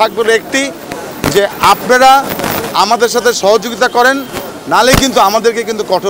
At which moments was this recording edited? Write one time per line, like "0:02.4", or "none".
none

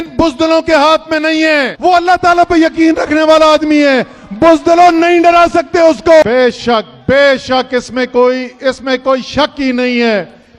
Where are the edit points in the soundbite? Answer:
0:01.7
0:06.2

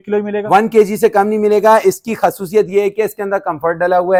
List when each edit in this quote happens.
none

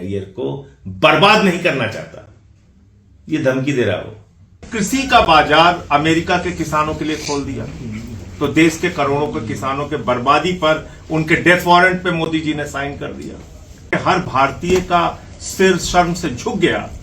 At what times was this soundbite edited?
0:04.7
0:13.9

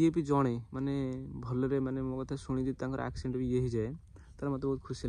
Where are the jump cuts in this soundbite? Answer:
none

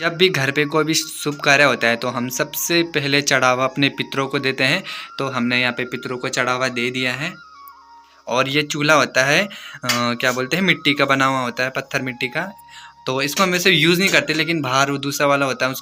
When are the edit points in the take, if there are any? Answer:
none

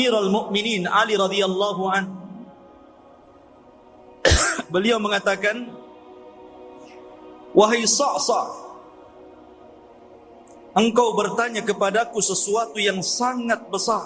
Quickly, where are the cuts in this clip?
0:02.8
0:04.2
0:06.1
0:07.5
0:08.8
0:10.7

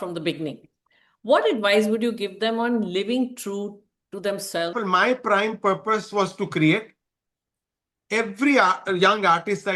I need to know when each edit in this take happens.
0:04.8

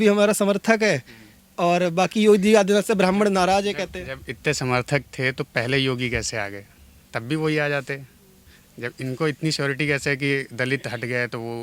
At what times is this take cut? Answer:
none

